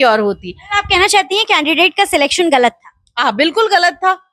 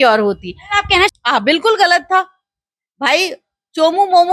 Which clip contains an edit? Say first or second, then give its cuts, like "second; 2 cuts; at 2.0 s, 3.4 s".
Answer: second; 1 cut; at 1.1 s